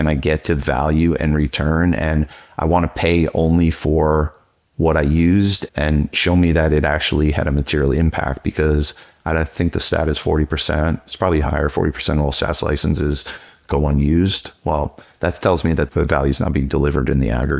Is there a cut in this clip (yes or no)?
yes